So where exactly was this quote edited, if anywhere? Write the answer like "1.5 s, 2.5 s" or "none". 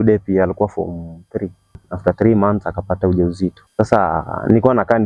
1.9 s, 3.6 s

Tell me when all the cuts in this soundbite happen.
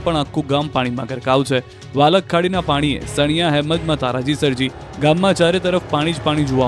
4.2 s

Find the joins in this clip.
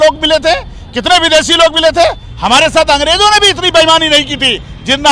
2.3 s

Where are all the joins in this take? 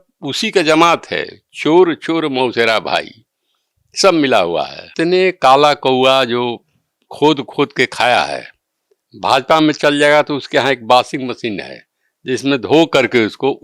4.9 s

